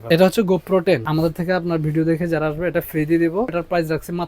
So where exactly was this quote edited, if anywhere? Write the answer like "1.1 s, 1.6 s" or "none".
1.0 s, 3.5 s